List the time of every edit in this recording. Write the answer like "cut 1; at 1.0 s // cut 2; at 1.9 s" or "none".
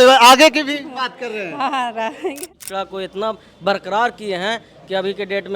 cut 1; at 2.4 s